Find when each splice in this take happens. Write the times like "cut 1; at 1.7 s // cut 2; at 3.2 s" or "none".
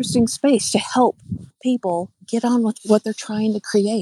cut 1; at 1.6 s // cut 2; at 2.6 s